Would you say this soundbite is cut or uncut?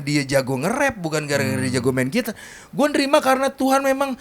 uncut